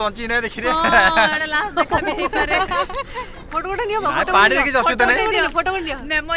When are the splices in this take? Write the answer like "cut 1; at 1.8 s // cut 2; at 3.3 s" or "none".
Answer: none